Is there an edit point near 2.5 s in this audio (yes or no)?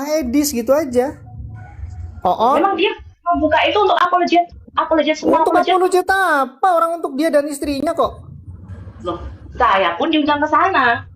no